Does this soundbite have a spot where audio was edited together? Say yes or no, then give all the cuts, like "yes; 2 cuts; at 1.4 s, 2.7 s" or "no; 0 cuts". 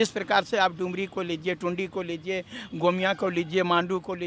no; 0 cuts